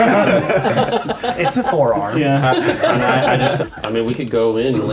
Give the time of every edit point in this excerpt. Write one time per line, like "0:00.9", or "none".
0:03.6